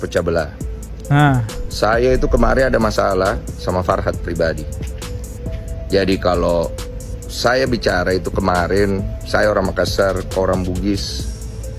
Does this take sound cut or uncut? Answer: uncut